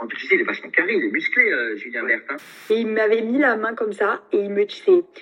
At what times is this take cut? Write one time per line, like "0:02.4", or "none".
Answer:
0:02.7